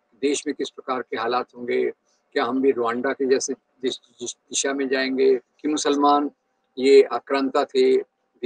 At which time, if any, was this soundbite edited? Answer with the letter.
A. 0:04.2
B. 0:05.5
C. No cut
B